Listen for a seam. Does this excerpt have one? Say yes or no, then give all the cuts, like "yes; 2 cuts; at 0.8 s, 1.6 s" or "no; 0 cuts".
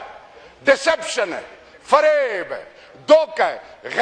no; 0 cuts